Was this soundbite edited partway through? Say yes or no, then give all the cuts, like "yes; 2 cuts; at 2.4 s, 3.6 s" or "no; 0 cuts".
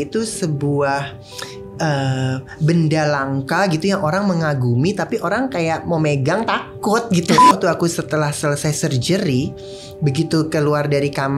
yes; 1 cut; at 7.5 s